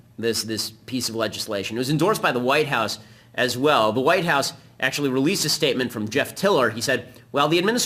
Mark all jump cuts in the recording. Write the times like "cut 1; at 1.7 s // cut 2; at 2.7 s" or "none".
cut 1; at 6.2 s